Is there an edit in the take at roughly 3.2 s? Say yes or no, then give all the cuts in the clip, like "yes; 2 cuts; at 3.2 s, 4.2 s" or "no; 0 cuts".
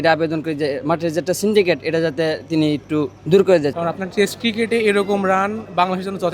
yes; 2 cuts; at 3.2 s, 3.7 s